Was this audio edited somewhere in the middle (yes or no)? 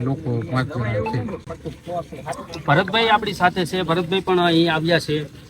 no